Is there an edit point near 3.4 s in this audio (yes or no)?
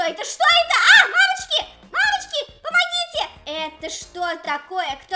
yes